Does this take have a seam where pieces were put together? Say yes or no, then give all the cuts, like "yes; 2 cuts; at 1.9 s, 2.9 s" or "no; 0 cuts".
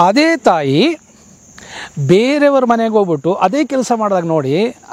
no; 0 cuts